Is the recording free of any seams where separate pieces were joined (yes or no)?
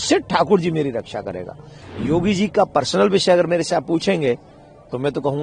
no